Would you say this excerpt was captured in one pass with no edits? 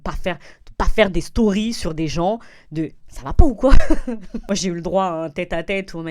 no; 1 cut; at 4.3 s

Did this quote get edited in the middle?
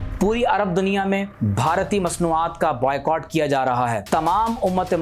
yes; 2 cuts; at 1.4 s, 4.0 s

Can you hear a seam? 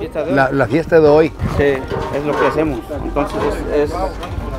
no; 0 cuts

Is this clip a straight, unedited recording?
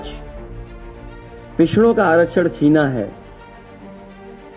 yes; 0 cuts

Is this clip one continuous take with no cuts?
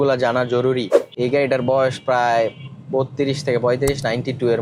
no; 1 cut; at 1.1 s

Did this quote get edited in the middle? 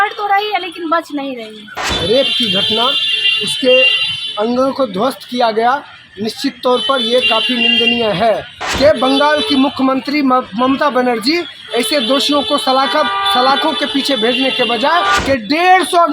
yes; 3 cuts; at 1.9 s, 8.6 s, 15.2 s

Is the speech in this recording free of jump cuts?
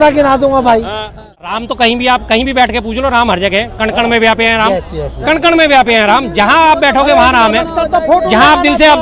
no; 1 cut; at 1.6 s

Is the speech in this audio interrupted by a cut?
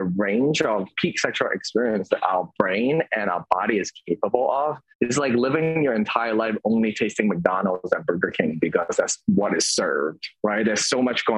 yes; 3 cuts; at 0.9 s, 4.9 s, 10.2 s

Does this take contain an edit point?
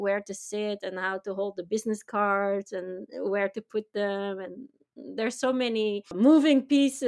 yes; 1 cut; at 6.1 s

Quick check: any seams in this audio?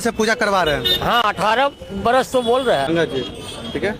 yes; 1 cut; at 2.9 s

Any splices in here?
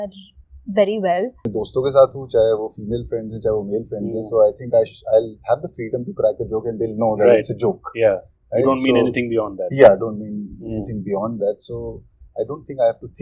yes; 1 cut; at 1.5 s

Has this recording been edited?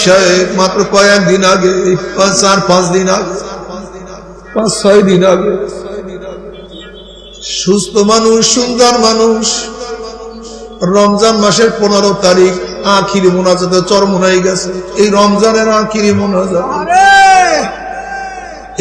no; 0 cuts

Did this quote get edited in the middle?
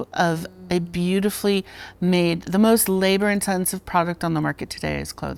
no; 0 cuts

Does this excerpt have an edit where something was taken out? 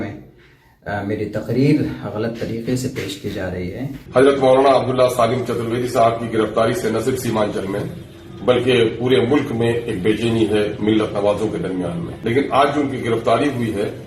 yes; 2 cuts; at 4.0 s, 12.1 s

